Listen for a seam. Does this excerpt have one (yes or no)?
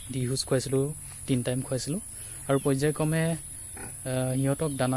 no